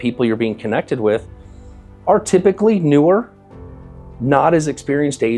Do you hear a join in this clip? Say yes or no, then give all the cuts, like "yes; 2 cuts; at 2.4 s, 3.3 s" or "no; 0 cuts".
no; 0 cuts